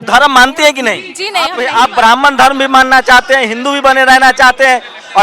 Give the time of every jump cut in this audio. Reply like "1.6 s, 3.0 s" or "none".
1.6 s